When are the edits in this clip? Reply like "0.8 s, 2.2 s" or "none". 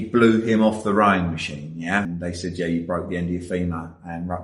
2.1 s